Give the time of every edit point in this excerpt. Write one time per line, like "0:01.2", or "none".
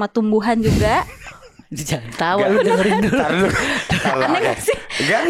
none

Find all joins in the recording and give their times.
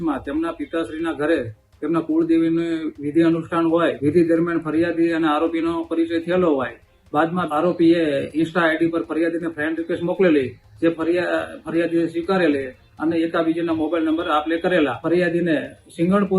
0:04.0
0:07.5
0:15.0

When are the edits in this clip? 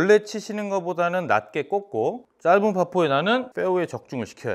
0:02.2
0:03.5

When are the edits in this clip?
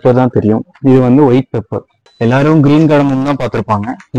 0:02.0

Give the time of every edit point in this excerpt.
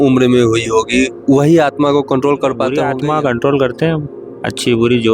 0:02.8

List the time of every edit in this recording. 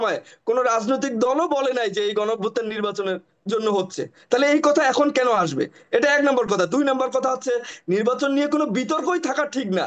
none

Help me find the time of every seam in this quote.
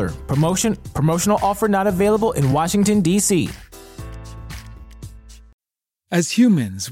0:05.7

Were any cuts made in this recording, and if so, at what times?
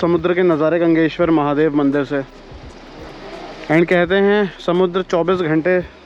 none

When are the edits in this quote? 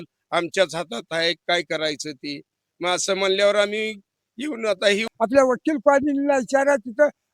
0:05.1

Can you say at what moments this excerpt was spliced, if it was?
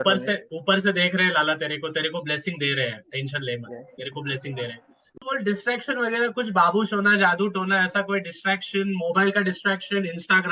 0:05.2

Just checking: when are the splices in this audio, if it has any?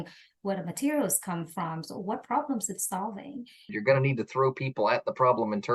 0:03.7

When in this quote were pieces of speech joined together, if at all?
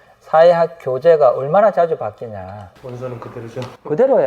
0:02.7

